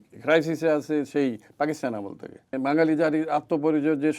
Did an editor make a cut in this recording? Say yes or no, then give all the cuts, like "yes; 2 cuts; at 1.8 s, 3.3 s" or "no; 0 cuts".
yes; 1 cut; at 2.5 s